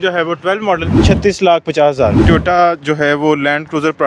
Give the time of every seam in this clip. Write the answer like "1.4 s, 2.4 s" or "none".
1.0 s, 2.2 s